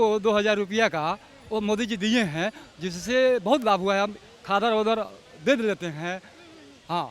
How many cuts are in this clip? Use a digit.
0